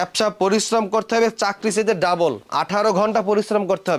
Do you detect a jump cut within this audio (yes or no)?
yes